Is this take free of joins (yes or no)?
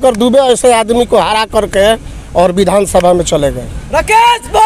yes